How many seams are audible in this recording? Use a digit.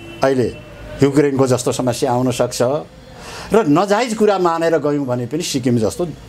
0